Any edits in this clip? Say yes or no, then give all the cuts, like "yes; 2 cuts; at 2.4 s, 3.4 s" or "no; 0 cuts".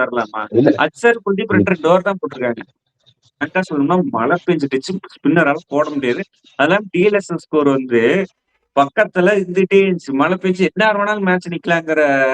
yes; 1 cut; at 3.4 s